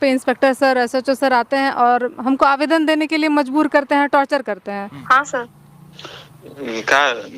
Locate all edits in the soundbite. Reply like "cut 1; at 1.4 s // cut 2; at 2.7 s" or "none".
cut 1; at 5.0 s